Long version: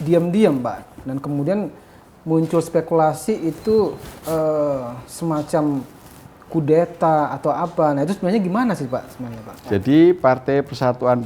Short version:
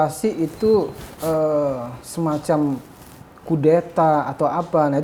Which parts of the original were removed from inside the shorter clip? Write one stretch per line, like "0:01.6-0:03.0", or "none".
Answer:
none